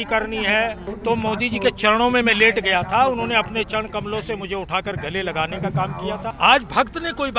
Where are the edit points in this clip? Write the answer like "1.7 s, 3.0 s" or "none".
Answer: 0.9 s, 6.3 s